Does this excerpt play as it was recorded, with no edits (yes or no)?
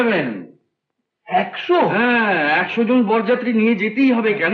yes